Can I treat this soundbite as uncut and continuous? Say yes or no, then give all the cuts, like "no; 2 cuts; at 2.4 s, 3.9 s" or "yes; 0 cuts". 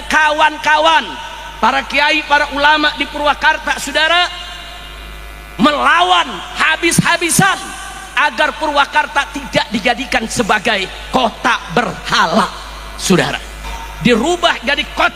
no; 1 cut; at 13.8 s